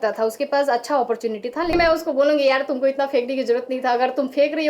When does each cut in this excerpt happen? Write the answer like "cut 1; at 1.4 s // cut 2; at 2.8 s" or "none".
cut 1; at 1.7 s